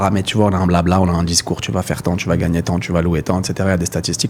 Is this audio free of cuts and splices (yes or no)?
yes